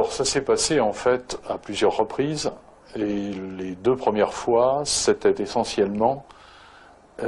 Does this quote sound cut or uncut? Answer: cut